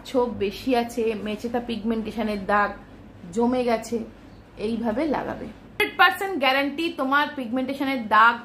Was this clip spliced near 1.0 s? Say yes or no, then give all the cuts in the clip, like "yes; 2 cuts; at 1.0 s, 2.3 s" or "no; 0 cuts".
no; 1 cut; at 5.8 s